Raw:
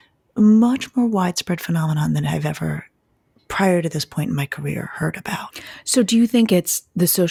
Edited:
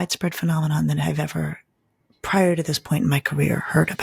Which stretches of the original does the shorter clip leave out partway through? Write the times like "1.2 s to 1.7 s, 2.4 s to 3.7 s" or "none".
none